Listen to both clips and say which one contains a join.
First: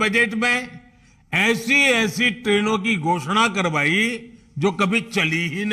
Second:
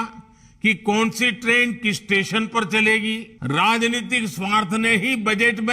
second; 1 cut; at 3.3 s

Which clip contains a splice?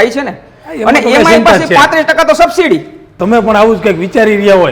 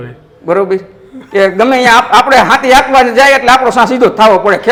first; 1 cut; at 3.1 s

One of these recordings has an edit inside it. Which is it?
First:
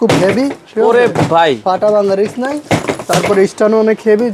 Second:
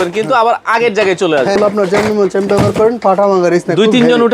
second; 1 cut; at 1.6 s

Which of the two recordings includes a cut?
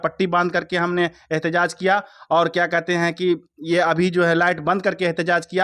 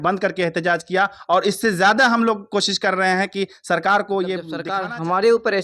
second; 1 cut; at 4.6 s

